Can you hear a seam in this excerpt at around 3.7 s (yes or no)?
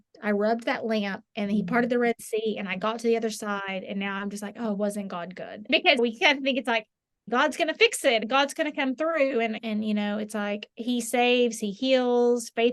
no